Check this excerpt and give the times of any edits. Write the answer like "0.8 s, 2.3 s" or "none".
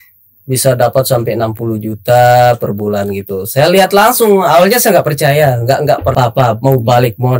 6.1 s